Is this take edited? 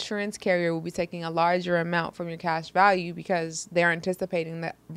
no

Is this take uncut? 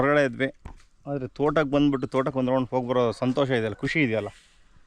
yes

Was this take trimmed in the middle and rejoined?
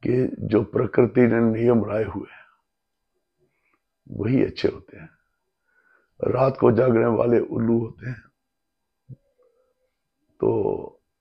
no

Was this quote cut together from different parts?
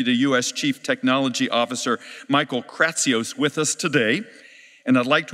yes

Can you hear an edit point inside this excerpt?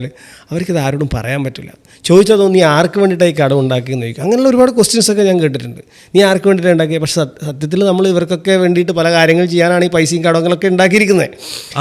no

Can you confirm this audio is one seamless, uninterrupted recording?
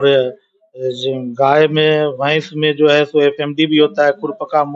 yes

